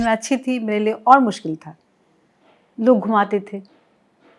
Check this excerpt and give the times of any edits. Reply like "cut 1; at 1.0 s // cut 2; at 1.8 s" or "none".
none